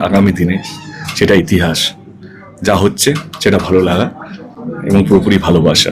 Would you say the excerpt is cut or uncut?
uncut